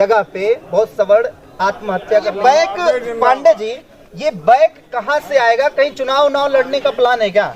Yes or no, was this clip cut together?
yes